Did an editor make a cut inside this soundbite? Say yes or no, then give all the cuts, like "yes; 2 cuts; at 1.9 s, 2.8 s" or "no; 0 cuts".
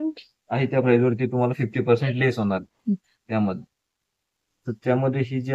no; 0 cuts